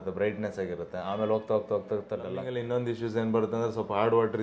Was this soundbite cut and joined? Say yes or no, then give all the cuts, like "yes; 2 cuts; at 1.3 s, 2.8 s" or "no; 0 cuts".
yes; 1 cut; at 2.5 s